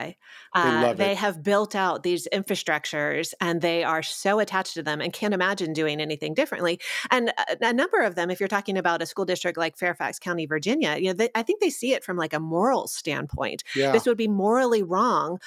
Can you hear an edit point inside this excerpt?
no; 0 cuts

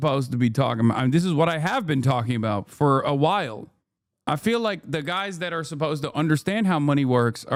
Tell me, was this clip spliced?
no; 0 cuts

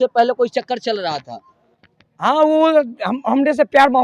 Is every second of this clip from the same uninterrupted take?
yes; 0 cuts

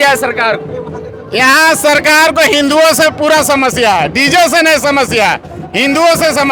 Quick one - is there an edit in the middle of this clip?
no; 0 cuts

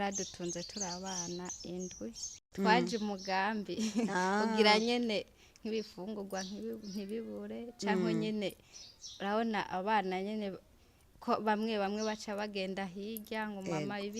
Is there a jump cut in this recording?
yes; 1 cut; at 2.3 s

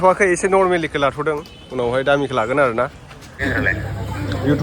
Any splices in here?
yes; 1 cut; at 3.5 s

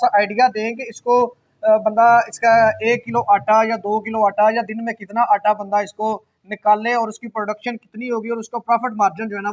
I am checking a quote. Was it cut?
no; 0 cuts

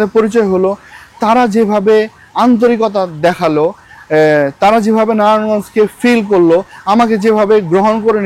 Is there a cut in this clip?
no; 0 cuts

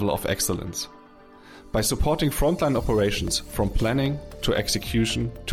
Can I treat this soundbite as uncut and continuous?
yes; 0 cuts

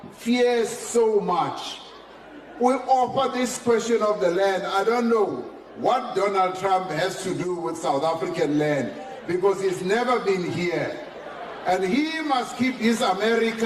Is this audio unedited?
yes; 0 cuts

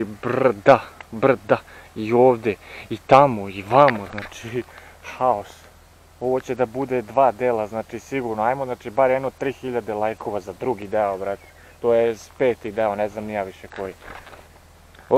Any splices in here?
no; 0 cuts

